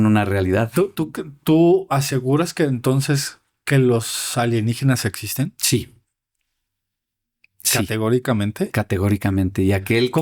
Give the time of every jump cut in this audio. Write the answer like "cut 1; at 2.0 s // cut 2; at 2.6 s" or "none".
none